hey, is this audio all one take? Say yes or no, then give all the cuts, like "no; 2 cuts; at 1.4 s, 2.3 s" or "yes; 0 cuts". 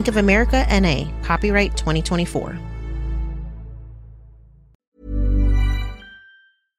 no; 1 cut; at 4.9 s